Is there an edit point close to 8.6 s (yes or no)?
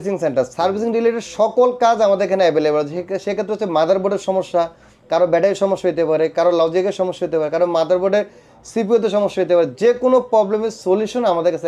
no